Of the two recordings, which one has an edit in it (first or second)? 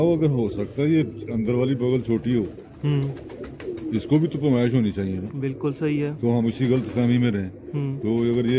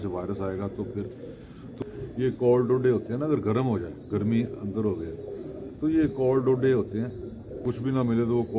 second